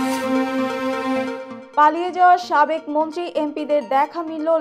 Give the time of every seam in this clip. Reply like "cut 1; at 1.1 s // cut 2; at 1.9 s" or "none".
cut 1; at 1.5 s

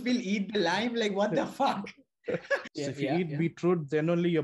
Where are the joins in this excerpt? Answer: cut 1; at 2.7 s

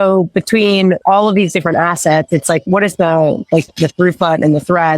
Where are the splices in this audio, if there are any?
cut 1; at 1.0 s // cut 2; at 2.6 s // cut 3; at 3.7 s

